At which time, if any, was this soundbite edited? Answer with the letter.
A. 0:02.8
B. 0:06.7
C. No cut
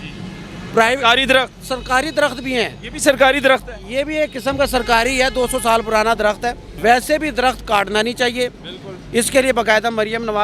B